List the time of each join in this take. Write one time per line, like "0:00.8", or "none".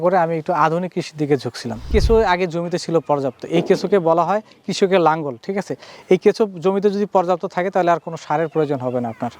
0:01.8